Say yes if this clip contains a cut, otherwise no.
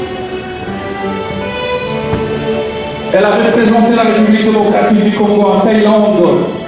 no